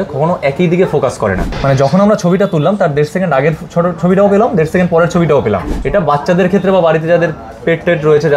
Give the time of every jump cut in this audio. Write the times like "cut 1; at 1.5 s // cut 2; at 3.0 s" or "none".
cut 1; at 1.5 s // cut 2; at 5.7 s